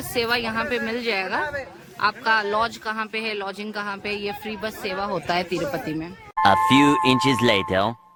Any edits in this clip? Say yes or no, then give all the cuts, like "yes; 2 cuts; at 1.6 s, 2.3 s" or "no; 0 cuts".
no; 0 cuts